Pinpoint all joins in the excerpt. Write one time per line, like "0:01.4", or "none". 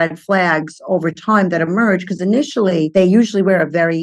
0:02.9